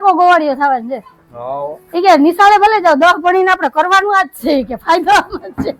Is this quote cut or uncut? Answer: uncut